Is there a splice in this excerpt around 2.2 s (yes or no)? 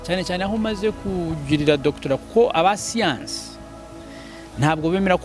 no